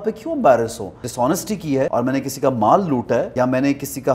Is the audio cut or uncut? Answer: cut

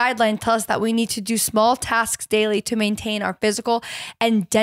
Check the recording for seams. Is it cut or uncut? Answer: uncut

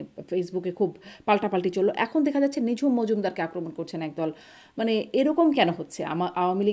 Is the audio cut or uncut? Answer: uncut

